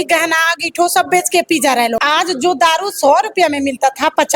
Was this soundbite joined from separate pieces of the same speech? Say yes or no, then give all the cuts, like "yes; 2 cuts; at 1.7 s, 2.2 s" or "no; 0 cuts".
yes; 1 cut; at 2.0 s